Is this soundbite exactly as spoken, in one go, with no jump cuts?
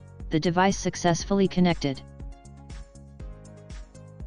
no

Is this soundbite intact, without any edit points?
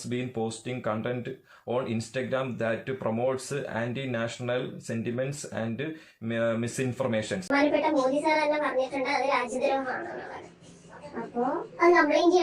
no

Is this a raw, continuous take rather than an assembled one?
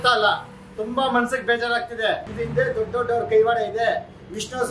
no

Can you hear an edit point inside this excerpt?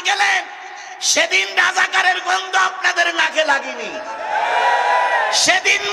no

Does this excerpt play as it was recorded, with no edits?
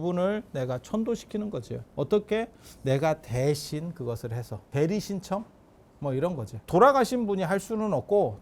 no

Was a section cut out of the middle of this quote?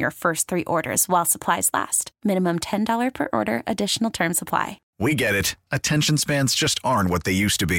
yes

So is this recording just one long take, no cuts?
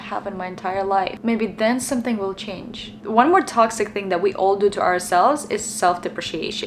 yes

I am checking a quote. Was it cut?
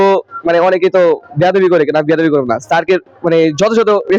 no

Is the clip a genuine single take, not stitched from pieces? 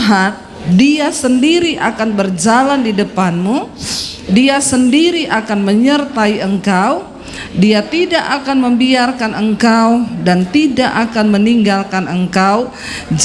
yes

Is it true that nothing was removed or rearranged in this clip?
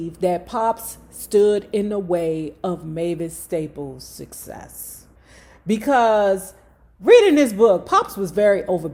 yes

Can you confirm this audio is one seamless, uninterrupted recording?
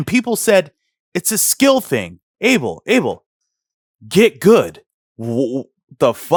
yes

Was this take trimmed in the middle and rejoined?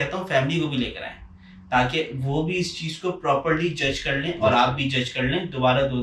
no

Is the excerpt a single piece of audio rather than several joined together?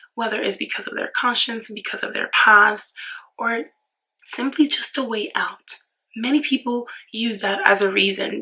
yes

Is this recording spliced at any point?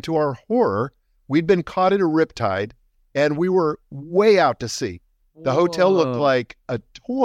no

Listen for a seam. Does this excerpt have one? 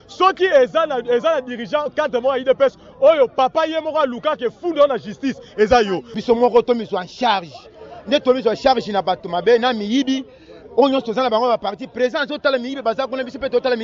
yes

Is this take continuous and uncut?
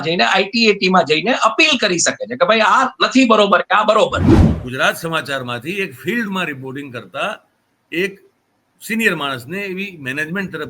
no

